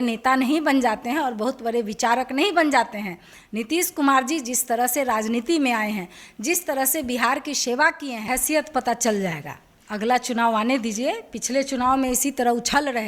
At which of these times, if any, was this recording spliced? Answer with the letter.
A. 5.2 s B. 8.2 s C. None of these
B